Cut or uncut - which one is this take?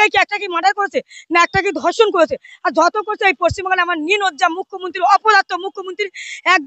uncut